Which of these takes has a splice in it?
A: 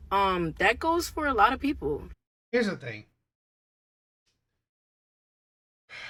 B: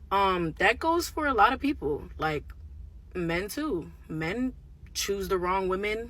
B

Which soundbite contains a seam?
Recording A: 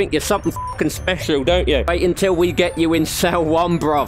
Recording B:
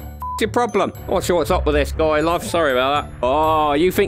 B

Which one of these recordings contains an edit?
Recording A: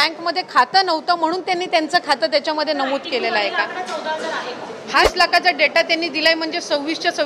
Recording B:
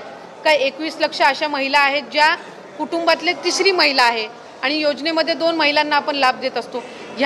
A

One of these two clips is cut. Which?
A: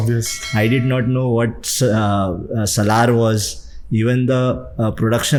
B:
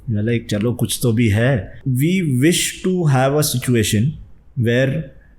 B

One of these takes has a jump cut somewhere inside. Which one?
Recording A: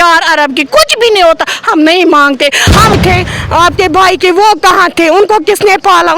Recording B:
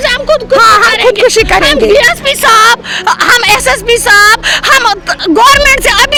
A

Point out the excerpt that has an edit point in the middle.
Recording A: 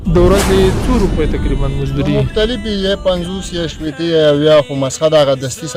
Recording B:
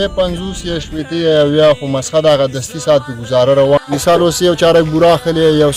B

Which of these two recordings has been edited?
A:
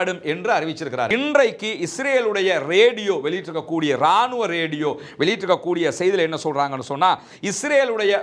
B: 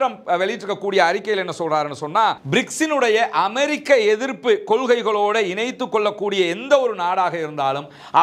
A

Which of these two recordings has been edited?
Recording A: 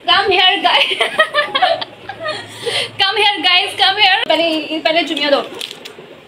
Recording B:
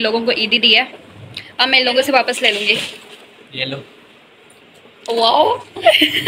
A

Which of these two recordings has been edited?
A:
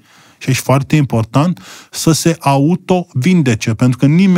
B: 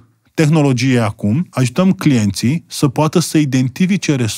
B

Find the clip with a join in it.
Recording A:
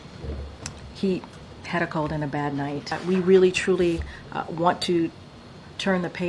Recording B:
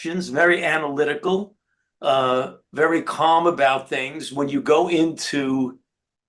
A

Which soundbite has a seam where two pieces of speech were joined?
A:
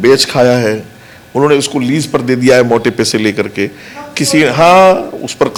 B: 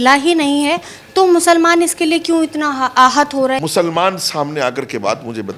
B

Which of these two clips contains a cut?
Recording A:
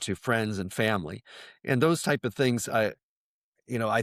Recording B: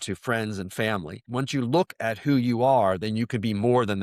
B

